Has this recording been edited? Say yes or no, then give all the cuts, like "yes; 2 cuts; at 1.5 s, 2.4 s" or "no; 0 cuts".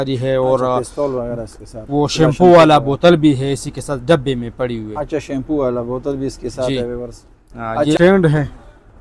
yes; 1 cut; at 8.0 s